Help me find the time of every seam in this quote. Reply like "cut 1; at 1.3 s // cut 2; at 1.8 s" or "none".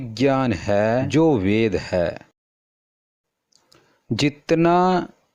none